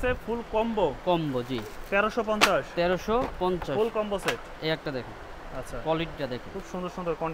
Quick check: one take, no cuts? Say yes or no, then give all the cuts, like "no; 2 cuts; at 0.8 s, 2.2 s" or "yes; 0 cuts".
yes; 0 cuts